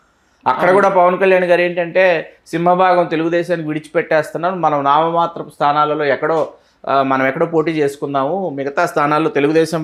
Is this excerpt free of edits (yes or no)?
yes